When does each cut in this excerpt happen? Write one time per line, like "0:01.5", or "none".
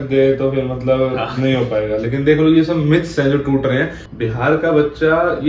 0:04.0